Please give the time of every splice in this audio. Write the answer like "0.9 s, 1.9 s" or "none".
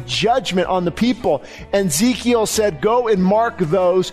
2.8 s